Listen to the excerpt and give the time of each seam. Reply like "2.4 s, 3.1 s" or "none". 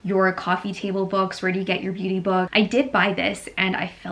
2.5 s